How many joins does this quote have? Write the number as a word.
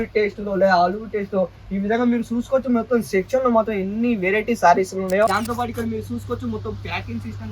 one